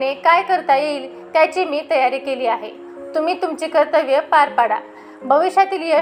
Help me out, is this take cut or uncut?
uncut